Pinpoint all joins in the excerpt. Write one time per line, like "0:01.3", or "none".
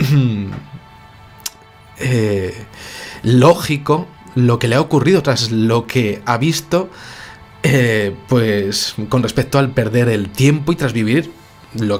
none